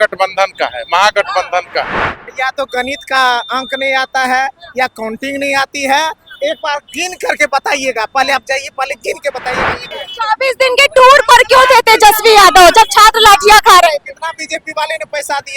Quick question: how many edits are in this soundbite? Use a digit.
2